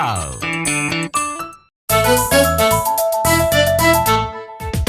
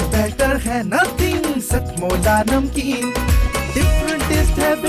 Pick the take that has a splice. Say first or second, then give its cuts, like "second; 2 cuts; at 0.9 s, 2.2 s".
first; 1 cut; at 1.8 s